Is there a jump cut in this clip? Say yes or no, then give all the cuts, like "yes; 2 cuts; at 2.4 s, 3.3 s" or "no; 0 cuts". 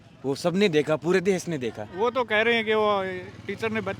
no; 0 cuts